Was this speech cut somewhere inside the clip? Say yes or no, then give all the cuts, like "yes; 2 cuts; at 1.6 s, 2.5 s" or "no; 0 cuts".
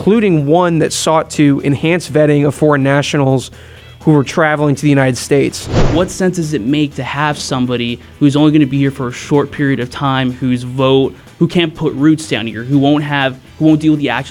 yes; 1 cut; at 5.8 s